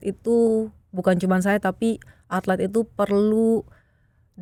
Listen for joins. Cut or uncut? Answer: uncut